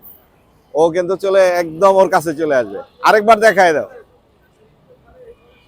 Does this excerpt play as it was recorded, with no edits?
yes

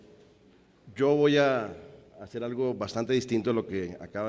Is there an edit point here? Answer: yes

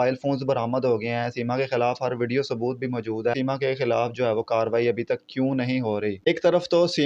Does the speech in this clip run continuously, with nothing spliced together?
no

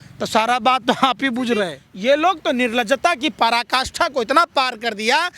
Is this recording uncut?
no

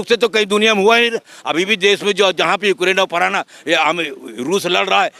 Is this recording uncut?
yes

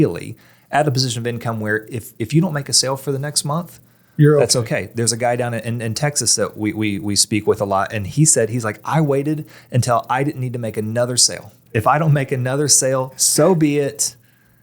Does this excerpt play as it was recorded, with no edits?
no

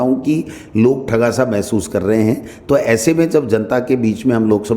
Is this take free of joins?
yes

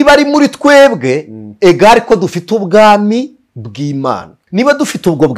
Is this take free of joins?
no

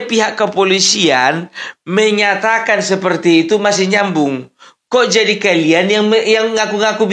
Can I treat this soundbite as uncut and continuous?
yes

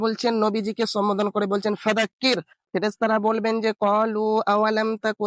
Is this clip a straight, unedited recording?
no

